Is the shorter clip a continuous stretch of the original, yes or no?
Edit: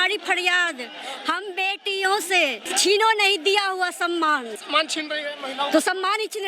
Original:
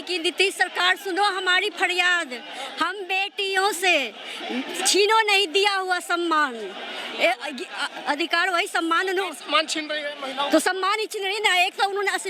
no